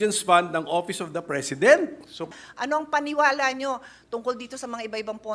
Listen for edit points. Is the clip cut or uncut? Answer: cut